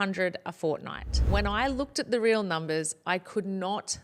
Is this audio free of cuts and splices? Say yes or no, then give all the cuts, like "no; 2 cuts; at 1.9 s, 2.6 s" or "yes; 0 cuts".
no; 1 cut; at 1.3 s